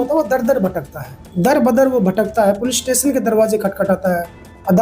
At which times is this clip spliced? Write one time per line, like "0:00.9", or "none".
0:01.5